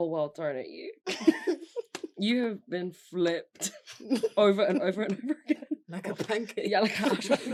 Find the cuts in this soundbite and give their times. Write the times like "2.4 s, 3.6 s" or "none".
none